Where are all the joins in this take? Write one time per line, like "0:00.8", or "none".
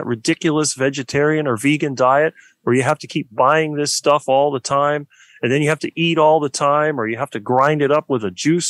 none